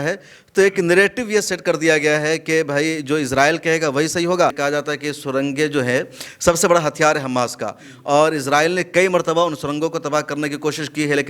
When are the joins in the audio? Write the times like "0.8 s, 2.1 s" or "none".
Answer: 4.6 s